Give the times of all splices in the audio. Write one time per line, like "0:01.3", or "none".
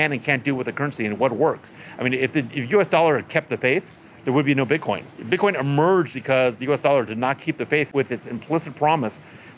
0:05.2
0:06.3
0:07.9